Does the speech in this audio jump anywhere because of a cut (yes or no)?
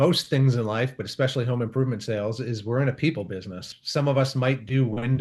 yes